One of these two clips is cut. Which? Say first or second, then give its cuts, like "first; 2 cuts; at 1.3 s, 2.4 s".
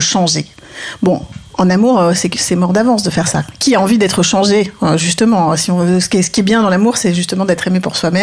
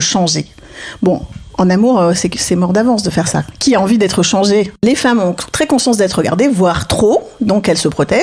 second; 1 cut; at 4.8 s